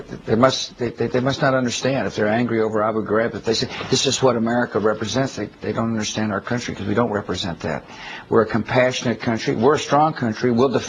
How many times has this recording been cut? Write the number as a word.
zero